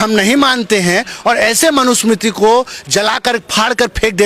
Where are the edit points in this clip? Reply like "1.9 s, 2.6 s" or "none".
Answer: none